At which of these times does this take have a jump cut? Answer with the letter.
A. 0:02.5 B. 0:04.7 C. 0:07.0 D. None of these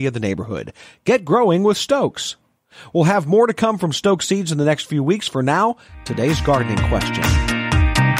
C